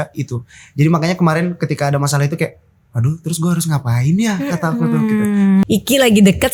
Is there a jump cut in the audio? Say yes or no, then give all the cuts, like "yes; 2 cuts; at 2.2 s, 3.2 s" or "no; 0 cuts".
yes; 1 cut; at 5.6 s